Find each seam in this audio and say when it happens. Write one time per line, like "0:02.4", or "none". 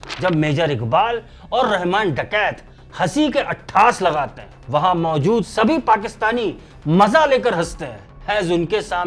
none